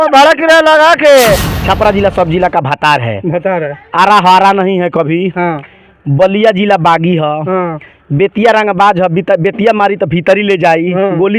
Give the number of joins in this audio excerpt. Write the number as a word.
one